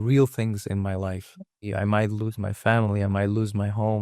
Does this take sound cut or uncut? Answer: cut